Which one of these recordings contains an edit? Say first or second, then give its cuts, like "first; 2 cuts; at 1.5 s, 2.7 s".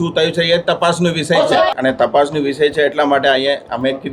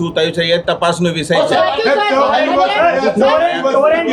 first; 1 cut; at 1.7 s